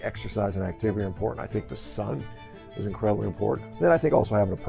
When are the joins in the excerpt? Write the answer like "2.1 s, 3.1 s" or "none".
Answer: 3.6 s